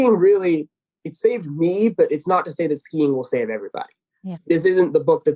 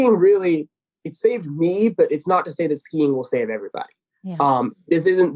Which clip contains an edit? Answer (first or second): first